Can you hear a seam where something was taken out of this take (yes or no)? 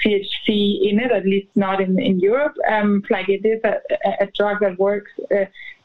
yes